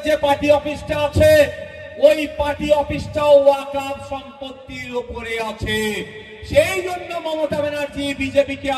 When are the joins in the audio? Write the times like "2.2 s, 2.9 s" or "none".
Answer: none